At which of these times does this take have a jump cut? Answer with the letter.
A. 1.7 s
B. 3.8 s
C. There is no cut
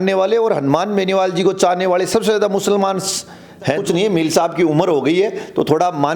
B